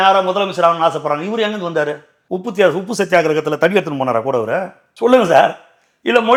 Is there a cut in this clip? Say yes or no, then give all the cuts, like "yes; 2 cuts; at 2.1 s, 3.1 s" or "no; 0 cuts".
no; 0 cuts